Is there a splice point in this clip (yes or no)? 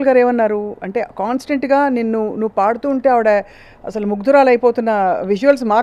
no